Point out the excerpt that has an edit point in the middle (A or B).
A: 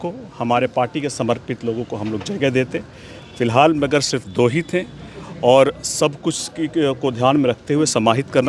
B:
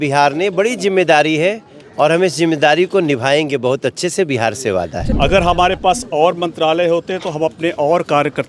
B